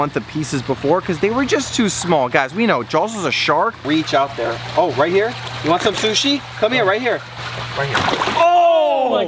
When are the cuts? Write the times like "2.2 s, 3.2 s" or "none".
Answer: 3.8 s, 7.3 s

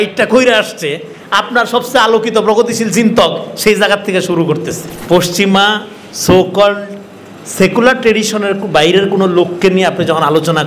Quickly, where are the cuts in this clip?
4.9 s

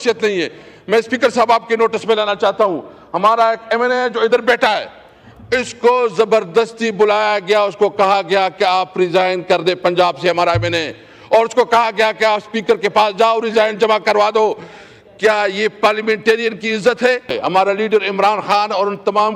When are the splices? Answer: 17.3 s

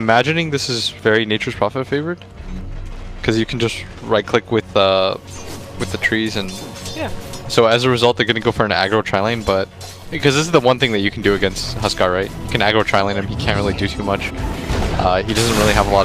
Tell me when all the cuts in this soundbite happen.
9.4 s

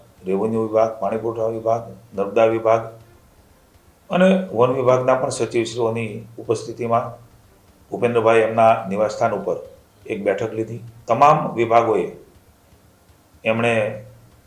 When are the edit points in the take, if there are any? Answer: 10.9 s

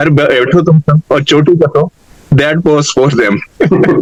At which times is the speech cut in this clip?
none

